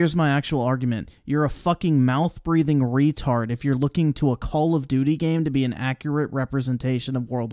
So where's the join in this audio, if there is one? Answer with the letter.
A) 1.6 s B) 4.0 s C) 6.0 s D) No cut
D